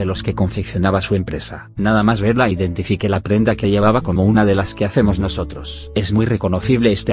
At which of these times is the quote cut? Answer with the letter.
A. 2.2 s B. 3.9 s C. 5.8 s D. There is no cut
C